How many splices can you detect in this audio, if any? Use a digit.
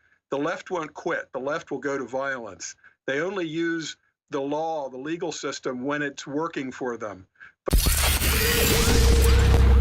1